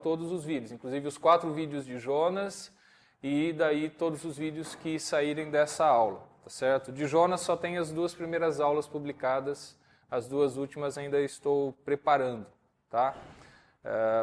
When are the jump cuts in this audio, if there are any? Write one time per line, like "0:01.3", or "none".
0:01.1